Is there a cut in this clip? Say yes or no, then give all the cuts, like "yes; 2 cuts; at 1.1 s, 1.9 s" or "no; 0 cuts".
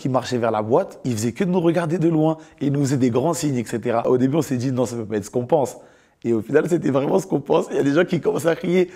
yes; 2 cuts; at 0.9 s, 4.0 s